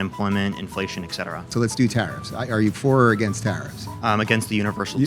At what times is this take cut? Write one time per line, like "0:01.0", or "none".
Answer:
0:01.4